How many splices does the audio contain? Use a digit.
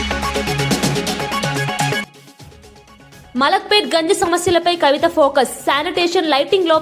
1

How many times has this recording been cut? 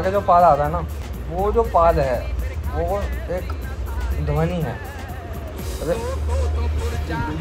0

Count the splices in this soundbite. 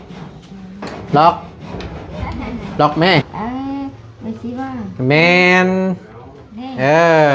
1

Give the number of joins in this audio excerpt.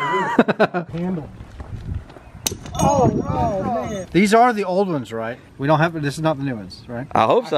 3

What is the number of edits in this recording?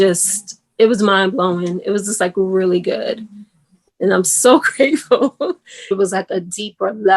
1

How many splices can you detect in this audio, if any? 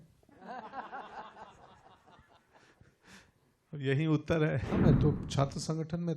1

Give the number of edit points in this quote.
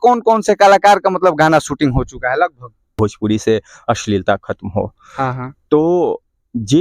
1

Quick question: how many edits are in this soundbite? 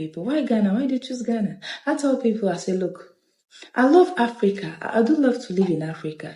0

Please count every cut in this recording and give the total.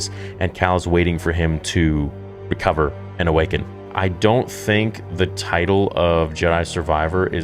1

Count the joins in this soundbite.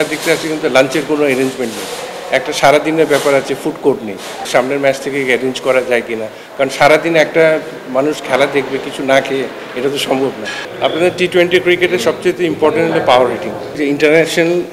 3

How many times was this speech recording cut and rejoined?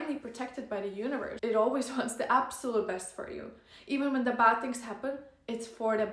1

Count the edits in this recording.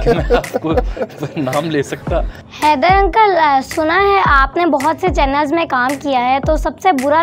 1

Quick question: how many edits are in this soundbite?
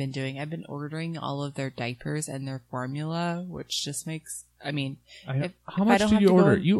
0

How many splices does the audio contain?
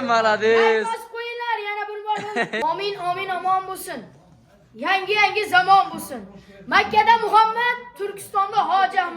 1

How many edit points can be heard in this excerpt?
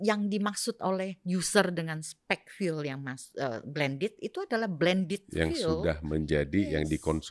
0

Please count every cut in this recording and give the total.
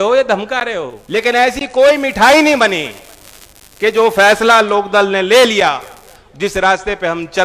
1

